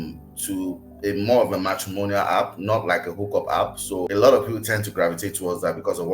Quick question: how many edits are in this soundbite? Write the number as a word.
one